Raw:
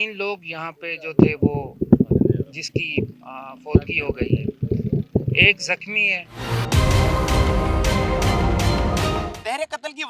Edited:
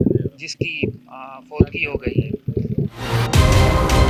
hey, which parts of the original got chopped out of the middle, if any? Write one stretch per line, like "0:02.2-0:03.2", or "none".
0:05.1-0:06.3